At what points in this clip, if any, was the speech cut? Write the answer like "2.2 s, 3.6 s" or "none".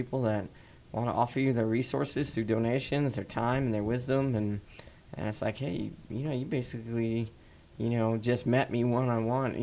none

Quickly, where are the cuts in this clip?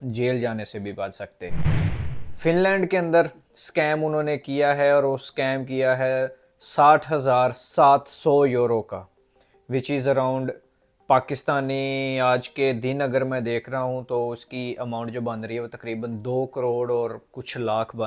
none

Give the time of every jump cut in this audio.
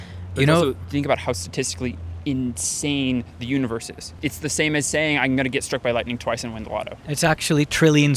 4.2 s, 7.0 s

